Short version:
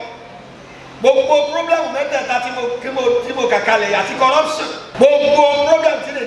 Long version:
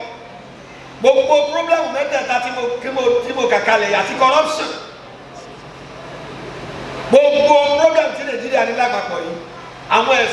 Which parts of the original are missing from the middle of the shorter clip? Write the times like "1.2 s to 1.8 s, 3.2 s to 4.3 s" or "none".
4.8 s to 6.9 s